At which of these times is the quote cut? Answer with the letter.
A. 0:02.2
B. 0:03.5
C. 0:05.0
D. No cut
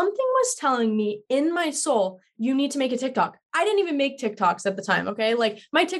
D